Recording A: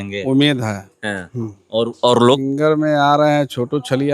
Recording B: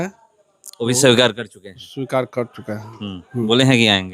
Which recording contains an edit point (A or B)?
A